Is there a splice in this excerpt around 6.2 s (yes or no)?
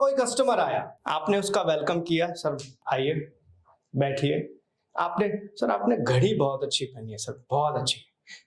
no